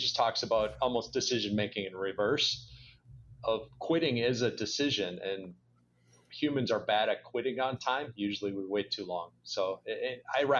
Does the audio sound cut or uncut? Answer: uncut